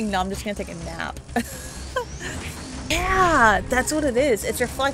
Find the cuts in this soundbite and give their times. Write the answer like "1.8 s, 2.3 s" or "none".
2.9 s